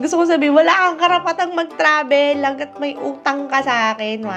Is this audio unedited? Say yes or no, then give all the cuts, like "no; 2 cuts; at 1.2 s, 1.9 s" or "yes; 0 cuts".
yes; 0 cuts